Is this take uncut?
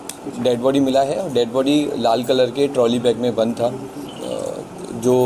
no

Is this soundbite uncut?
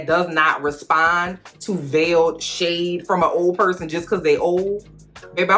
yes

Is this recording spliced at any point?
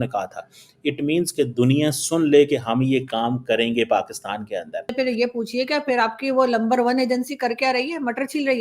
yes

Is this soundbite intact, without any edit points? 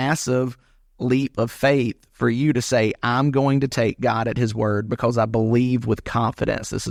yes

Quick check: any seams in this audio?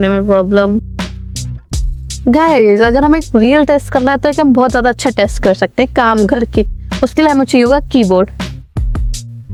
no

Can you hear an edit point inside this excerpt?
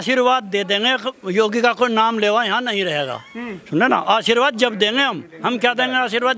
no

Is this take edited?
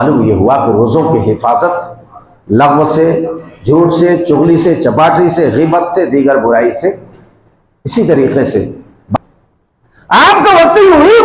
yes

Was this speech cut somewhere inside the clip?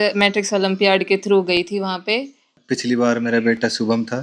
yes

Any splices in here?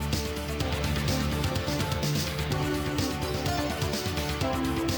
no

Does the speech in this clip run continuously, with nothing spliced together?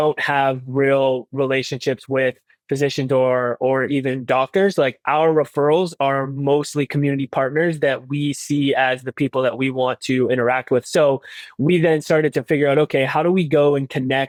yes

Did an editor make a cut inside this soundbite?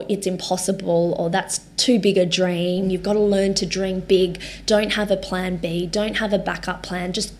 yes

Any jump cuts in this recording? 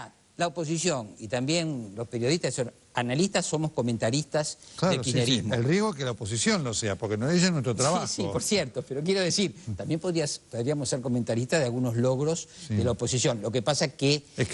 no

